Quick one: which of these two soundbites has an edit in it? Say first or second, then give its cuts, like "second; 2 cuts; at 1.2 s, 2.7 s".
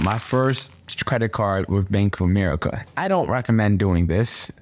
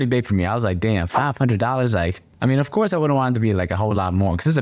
first; 1 cut; at 2.9 s